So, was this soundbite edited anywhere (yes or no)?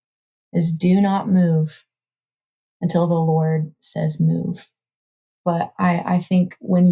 yes